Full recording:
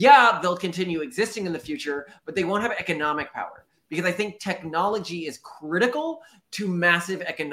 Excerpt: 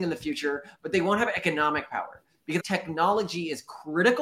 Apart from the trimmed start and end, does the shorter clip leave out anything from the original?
yes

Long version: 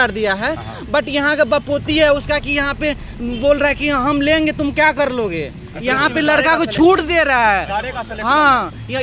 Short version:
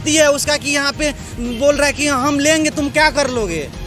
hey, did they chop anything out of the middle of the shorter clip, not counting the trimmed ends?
no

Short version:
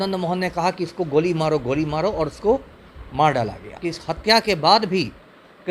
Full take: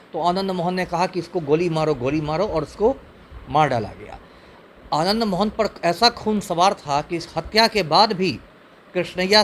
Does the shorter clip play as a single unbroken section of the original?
no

